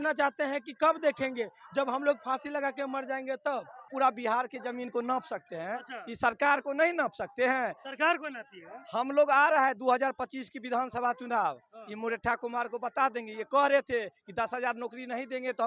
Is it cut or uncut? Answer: cut